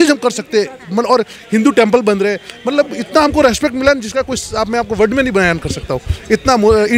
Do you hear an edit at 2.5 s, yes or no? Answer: no